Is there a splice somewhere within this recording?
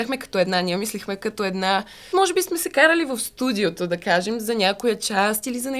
yes; 1 cut; at 2.1 s

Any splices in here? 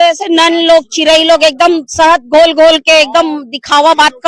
no; 0 cuts

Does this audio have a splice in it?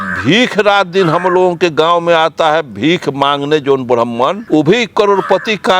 yes; 1 cut; at 4.4 s

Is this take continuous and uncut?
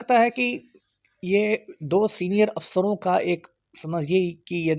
yes; 0 cuts

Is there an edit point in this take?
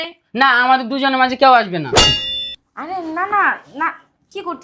yes; 1 cut; at 2.2 s

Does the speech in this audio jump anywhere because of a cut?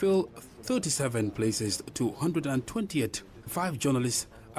no; 0 cuts

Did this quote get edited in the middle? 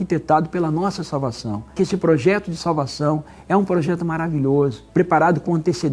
yes; 2 cuts; at 1.8 s, 4.8 s

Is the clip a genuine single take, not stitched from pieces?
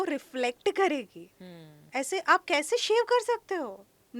yes; 0 cuts

